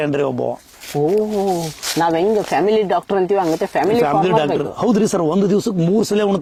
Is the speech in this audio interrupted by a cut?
no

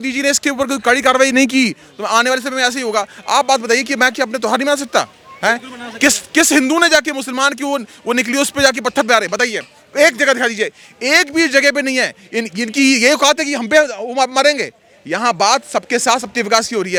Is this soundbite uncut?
yes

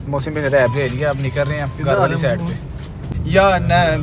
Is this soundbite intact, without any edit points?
no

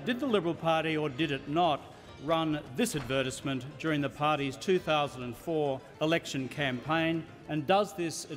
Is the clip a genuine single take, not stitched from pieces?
yes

